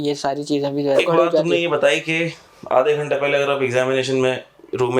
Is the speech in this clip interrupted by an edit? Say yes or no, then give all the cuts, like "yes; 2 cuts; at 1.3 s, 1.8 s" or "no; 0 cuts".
yes; 1 cut; at 1.0 s